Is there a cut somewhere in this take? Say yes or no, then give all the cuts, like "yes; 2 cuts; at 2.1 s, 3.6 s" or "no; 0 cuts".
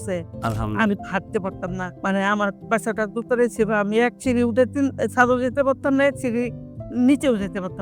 yes; 1 cut; at 1.9 s